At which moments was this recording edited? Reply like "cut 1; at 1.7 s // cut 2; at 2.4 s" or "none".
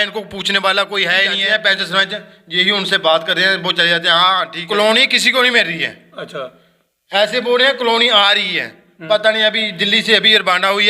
cut 1; at 1.4 s // cut 2; at 4.7 s